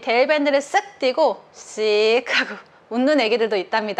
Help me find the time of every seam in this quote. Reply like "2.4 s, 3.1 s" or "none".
none